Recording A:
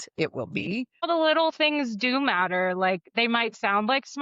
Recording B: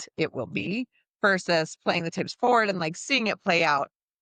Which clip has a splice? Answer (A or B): A